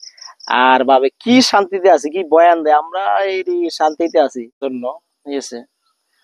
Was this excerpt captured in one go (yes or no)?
no